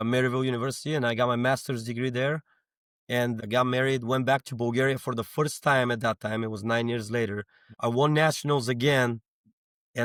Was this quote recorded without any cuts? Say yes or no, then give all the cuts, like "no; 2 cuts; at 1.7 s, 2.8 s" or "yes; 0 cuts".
yes; 0 cuts